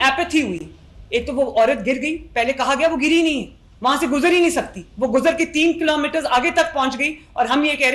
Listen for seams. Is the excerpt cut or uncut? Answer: uncut